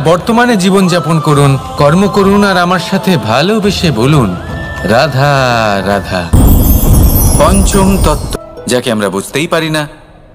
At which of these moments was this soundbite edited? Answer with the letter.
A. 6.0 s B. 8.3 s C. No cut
B